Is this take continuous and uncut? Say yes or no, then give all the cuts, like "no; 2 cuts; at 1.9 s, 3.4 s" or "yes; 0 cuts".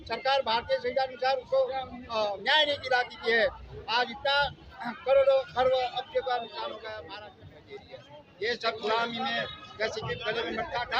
no; 1 cut; at 7.0 s